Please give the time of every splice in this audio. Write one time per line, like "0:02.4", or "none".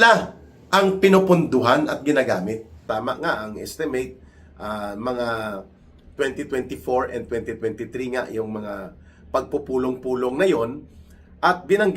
0:02.7